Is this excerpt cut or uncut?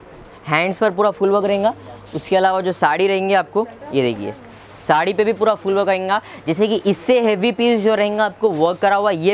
uncut